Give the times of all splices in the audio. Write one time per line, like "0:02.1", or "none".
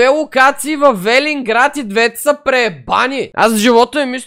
0:03.3